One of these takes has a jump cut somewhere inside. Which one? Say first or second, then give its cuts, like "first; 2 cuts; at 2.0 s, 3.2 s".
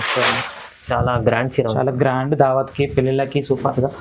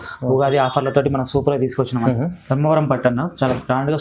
second; 1 cut; at 2.0 s